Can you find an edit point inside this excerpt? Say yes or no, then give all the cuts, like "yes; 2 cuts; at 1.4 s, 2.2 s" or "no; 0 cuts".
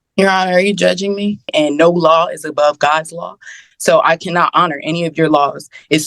yes; 1 cut; at 1.5 s